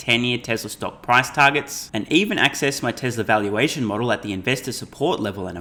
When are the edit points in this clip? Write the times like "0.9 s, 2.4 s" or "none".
none